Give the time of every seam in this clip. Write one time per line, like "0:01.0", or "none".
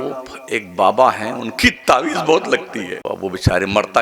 0:03.0